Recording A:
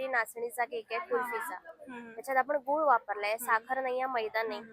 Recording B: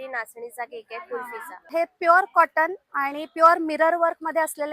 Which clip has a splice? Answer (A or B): B